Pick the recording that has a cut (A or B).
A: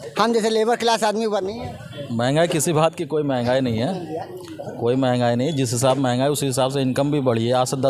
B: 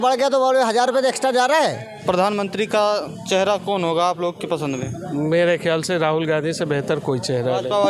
B